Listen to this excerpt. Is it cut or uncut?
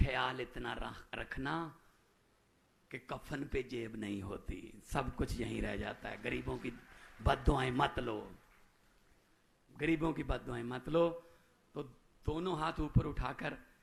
uncut